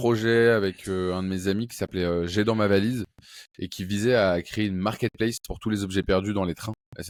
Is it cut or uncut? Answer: uncut